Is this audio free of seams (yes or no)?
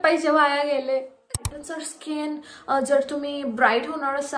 no